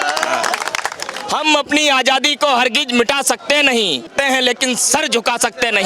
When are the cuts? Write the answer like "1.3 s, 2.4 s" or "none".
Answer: 1.1 s, 4.1 s